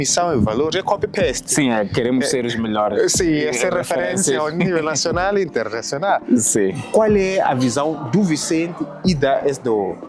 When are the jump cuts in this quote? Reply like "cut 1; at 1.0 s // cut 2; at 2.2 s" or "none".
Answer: cut 1; at 6.8 s